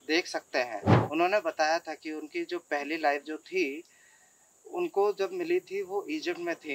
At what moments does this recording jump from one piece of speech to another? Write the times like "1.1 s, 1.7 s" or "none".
0.9 s

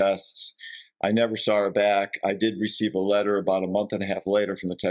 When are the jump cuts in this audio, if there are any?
none

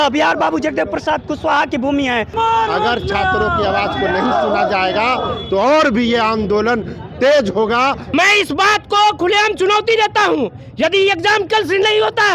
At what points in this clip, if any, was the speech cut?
2.3 s, 8.0 s

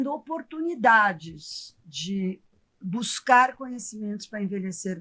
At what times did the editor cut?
none

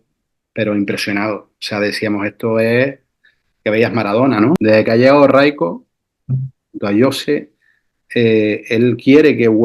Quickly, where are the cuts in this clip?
4.6 s

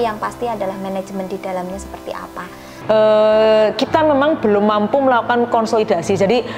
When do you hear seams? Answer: 2.7 s

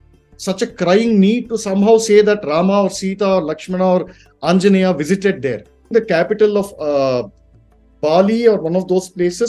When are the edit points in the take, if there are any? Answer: 5.9 s

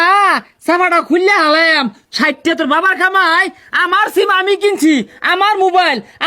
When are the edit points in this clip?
none

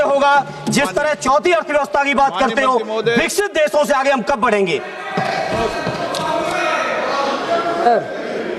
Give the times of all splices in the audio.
none

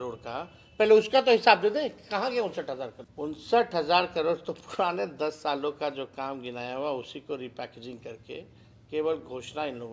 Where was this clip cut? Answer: 3.0 s

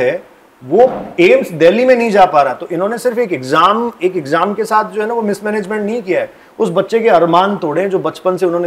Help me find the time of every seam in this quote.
none

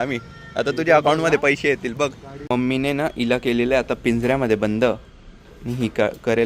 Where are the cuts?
2.3 s

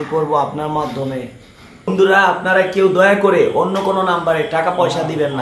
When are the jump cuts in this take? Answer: 1.9 s

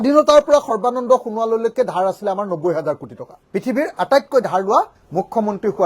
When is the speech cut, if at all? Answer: 3.3 s

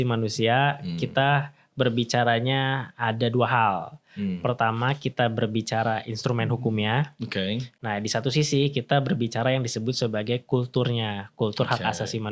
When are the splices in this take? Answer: 7.7 s

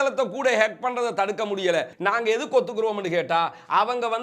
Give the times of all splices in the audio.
1.9 s

